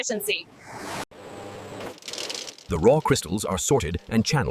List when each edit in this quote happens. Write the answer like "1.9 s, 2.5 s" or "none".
1.1 s